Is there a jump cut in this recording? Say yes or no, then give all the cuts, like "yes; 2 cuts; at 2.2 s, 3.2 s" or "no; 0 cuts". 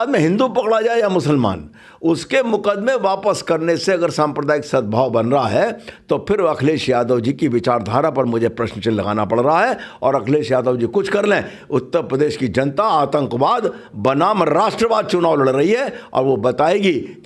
no; 0 cuts